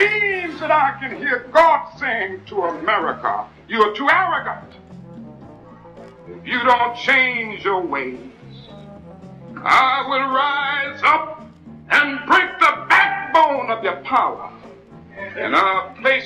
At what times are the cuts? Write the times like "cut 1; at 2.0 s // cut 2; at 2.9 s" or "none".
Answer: none

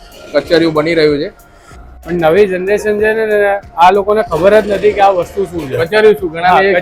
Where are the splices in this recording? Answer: cut 1; at 2.1 s

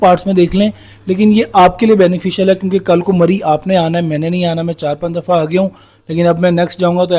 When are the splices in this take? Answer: none

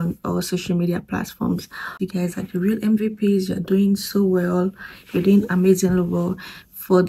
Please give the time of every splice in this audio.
cut 1; at 1.9 s

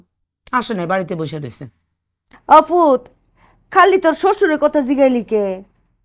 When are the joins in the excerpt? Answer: cut 1; at 2.2 s

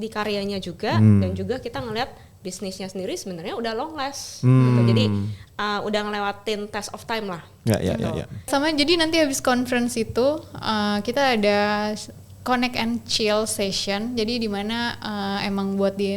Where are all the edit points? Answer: cut 1; at 8.5 s

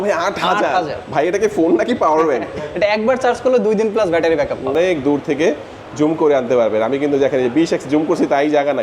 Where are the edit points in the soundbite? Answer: cut 1; at 4.7 s

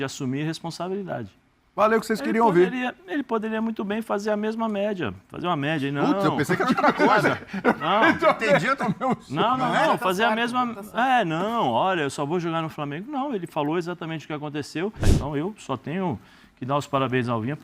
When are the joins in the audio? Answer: cut 1; at 15.1 s

